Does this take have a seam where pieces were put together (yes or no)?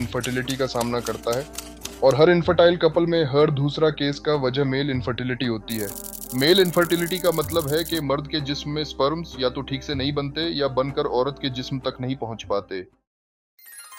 no